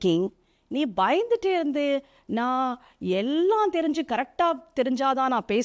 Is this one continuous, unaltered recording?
yes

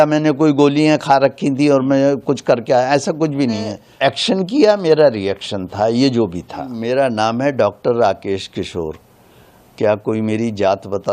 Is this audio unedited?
no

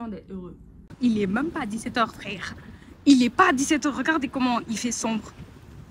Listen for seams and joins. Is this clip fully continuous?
no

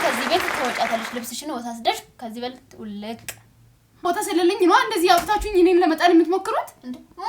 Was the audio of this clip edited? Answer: yes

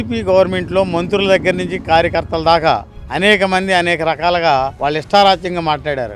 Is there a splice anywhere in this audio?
no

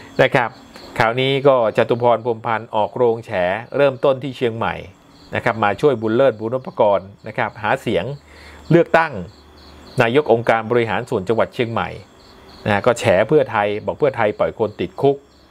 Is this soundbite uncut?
yes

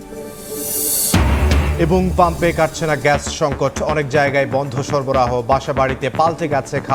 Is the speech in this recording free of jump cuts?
yes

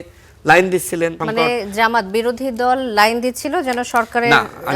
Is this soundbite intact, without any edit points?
no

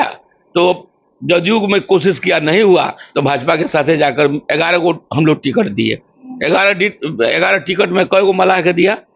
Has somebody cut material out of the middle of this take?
yes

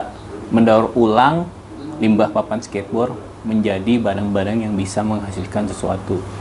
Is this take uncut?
yes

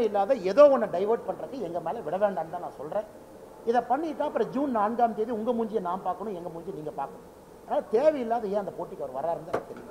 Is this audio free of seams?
yes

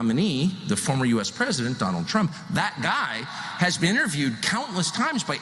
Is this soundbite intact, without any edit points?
yes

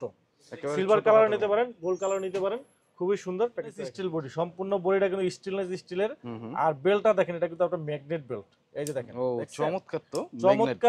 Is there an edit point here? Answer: yes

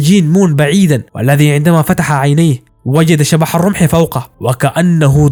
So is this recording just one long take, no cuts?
yes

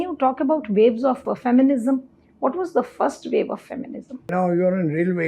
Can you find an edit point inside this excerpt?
yes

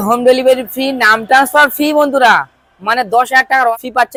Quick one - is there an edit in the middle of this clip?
no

